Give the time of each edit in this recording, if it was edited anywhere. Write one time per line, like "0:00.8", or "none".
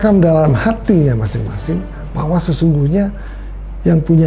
none